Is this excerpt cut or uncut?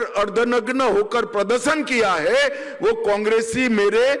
uncut